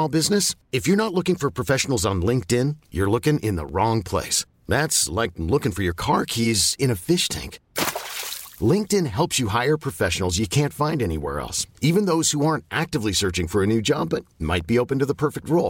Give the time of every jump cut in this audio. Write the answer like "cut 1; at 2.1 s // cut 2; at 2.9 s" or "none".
none